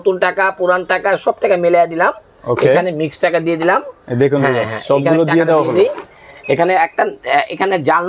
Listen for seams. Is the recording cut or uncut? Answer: uncut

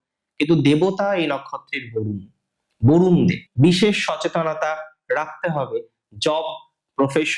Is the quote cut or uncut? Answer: cut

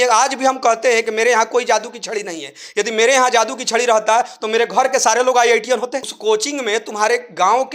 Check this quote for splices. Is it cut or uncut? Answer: cut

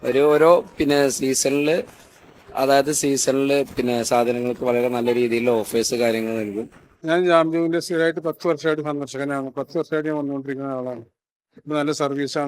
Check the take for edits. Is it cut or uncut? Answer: uncut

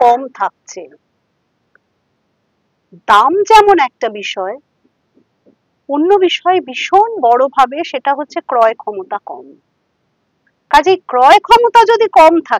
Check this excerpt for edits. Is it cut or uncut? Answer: uncut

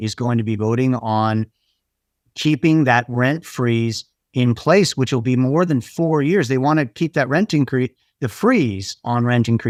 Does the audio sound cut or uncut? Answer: uncut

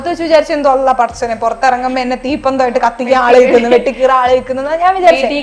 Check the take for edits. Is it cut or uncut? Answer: uncut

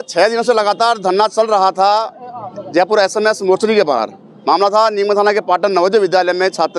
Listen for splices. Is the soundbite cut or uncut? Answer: uncut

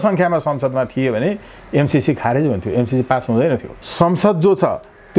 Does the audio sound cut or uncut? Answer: cut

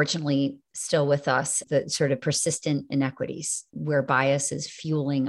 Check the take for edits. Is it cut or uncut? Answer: cut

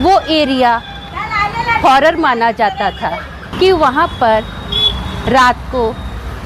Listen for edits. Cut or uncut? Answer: cut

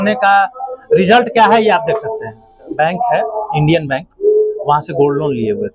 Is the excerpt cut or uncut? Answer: cut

